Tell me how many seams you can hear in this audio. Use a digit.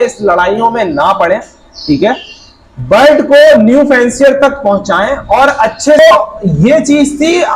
1